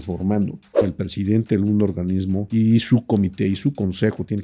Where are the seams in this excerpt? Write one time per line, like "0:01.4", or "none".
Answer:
0:00.8
0:02.5

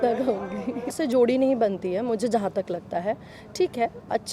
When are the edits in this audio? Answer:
0:01.0

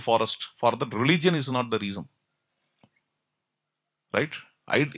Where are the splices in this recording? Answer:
none

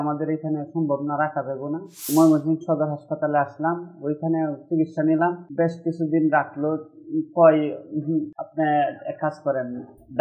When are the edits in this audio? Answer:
0:02.0
0:05.4
0:08.4

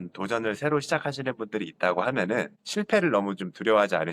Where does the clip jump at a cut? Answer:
0:02.6

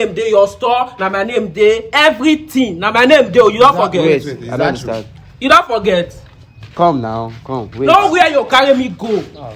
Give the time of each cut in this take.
none

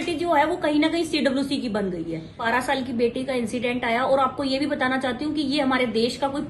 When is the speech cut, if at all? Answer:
0:02.5

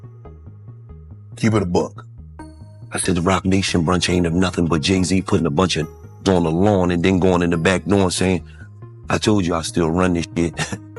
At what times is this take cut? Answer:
none

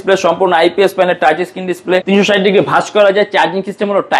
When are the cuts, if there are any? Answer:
0:02.0

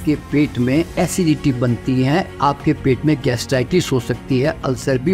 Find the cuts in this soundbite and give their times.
0:00.9

